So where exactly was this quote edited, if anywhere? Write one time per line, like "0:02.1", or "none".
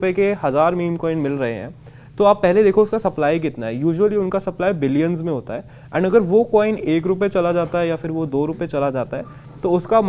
none

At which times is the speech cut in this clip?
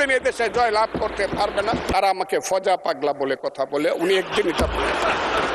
0:01.9

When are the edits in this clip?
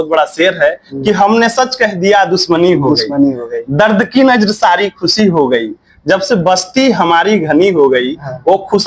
none

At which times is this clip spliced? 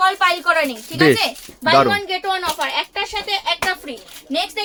none

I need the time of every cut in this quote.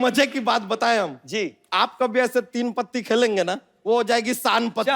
0:01.2
0:03.7

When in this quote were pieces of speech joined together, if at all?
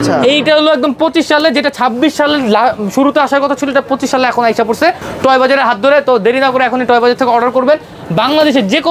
none

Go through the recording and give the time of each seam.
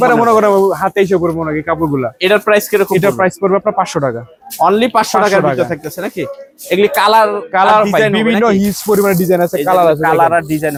none

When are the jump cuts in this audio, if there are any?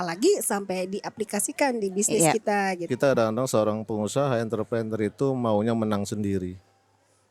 0:02.9

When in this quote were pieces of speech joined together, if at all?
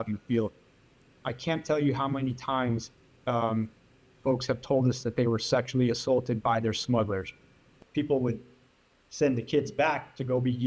0:07.7

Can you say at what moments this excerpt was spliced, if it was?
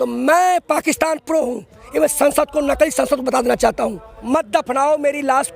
0:04.1

